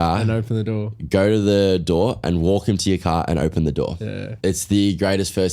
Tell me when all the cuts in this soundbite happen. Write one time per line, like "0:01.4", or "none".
0:04.2